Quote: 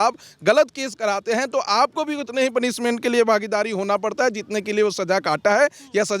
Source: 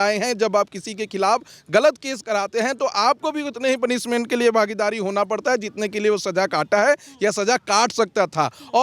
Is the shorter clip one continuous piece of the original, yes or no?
yes